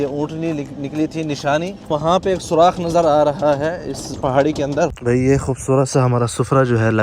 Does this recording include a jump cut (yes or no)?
yes